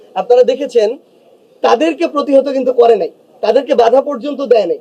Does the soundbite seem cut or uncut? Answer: uncut